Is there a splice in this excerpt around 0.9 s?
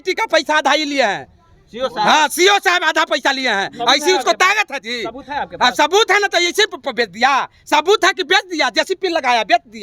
no; 0 cuts

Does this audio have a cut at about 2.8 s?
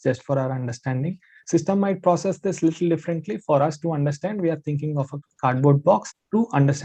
no; 0 cuts

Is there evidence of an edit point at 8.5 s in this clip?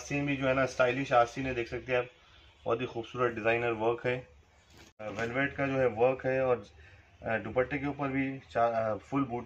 no; 1 cut; at 5.1 s

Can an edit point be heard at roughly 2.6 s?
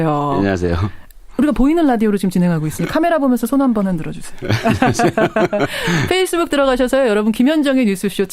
no; 1 cut; at 0.9 s

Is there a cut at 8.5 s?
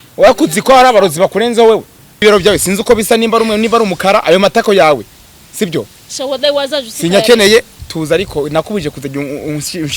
no; 1 cut; at 2.2 s

